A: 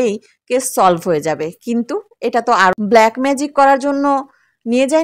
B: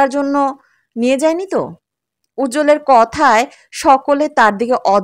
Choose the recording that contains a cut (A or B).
A